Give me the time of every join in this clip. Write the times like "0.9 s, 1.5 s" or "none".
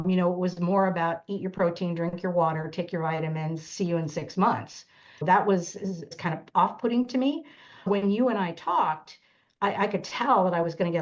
5.2 s, 6.2 s, 7.9 s